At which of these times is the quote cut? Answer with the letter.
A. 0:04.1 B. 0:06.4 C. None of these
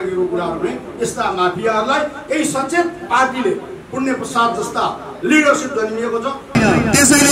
B